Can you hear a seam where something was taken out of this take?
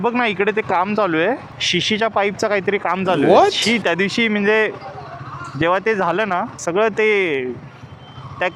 no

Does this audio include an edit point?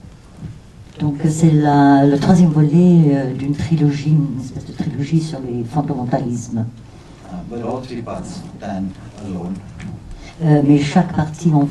yes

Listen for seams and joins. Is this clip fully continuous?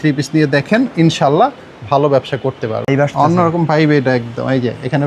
no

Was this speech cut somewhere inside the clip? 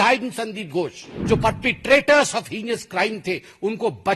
yes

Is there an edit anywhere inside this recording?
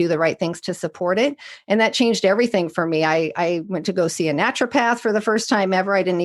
no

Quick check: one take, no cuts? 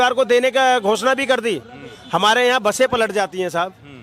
yes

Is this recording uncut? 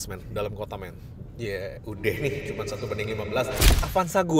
yes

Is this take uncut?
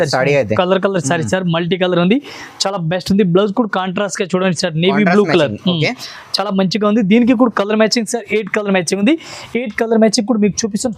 yes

